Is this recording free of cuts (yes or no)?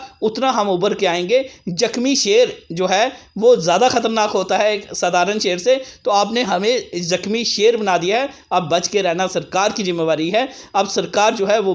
yes